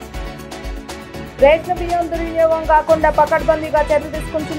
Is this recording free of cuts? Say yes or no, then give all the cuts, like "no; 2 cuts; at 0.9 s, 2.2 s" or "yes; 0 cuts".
yes; 0 cuts